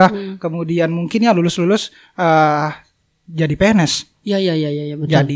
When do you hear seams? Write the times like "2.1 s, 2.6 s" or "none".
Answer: none